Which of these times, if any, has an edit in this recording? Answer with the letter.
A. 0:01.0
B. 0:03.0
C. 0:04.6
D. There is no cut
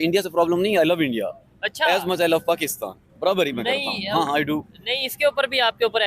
D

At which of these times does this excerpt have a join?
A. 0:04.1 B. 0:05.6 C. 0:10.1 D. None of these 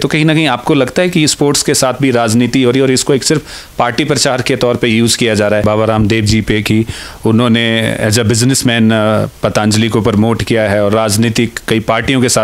B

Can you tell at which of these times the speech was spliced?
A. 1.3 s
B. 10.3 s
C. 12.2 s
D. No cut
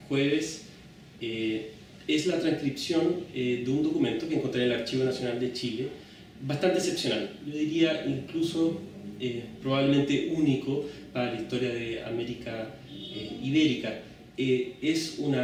D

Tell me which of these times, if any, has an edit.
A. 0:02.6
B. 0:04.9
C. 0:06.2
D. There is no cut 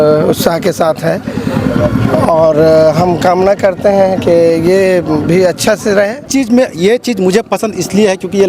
C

